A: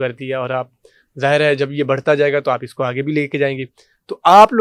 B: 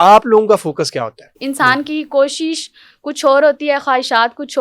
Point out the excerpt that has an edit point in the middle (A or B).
B